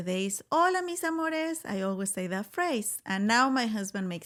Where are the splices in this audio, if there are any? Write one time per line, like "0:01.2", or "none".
none